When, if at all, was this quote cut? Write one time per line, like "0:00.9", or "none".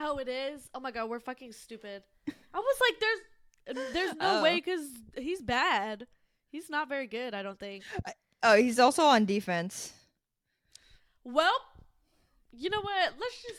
none